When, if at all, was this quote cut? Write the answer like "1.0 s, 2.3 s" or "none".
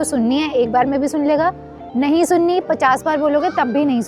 none

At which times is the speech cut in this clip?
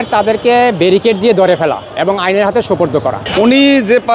3.2 s

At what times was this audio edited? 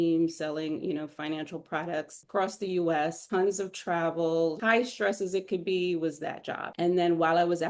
2.2 s, 4.6 s, 6.8 s

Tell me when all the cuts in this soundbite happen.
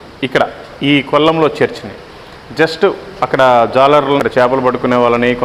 4.2 s

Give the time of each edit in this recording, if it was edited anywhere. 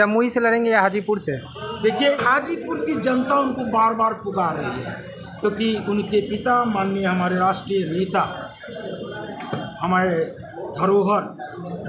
2.2 s

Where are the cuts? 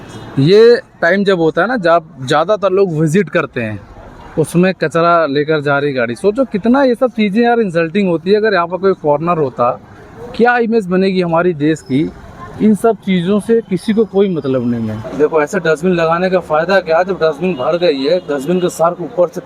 15.0 s

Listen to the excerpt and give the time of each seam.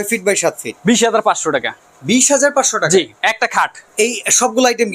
3.8 s

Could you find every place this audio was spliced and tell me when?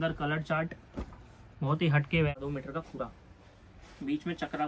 2.4 s

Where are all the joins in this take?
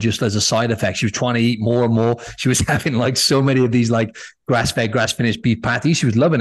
none

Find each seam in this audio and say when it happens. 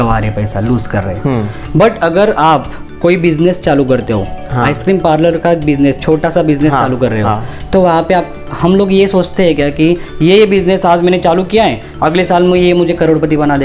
1.6 s

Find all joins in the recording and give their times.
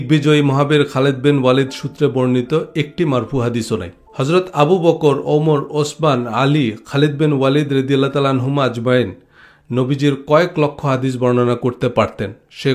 4.0 s

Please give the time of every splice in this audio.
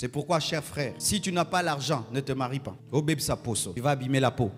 1.0 s, 2.8 s, 3.7 s

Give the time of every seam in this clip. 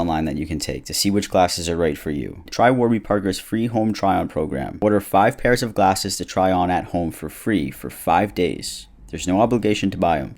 2.4 s

